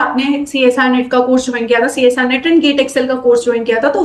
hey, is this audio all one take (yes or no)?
yes